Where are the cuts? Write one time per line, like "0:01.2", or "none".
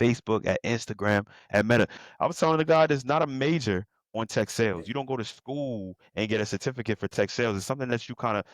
0:02.0